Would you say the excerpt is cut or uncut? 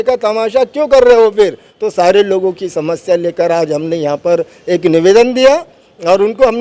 cut